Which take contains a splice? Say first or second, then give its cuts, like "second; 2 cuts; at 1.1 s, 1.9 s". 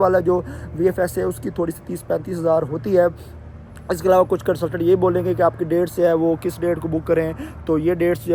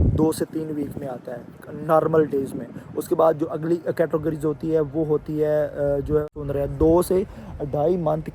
second; 1 cut; at 6.4 s